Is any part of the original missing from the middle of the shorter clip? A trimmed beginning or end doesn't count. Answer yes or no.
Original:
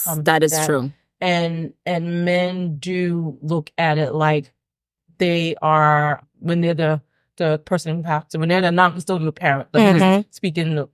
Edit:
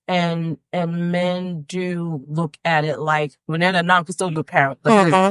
yes